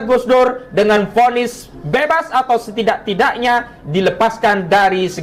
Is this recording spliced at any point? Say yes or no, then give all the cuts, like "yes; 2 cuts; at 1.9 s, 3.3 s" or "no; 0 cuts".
no; 0 cuts